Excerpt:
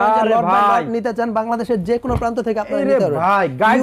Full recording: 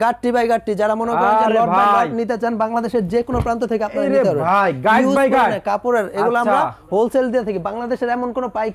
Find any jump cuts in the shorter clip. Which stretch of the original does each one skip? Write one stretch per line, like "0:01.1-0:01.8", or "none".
none